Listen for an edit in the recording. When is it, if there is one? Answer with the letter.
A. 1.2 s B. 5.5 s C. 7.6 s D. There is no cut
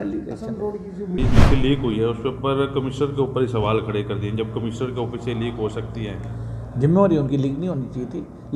A